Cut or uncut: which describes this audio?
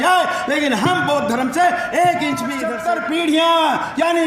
cut